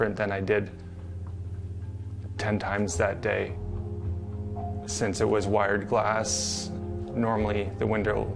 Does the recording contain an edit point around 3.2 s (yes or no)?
no